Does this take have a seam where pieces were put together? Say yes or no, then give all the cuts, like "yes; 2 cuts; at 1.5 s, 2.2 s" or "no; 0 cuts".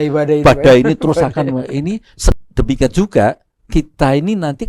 yes; 1 cut; at 2.4 s